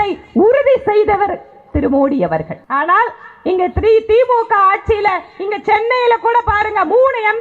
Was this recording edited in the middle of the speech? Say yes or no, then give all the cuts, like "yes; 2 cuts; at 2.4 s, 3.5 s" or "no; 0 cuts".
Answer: yes; 1 cut; at 2.6 s